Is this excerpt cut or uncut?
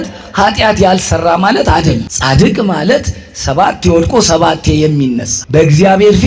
cut